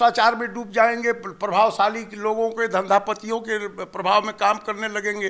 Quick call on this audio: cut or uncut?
uncut